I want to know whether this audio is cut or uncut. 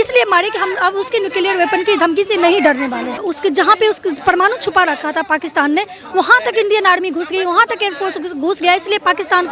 cut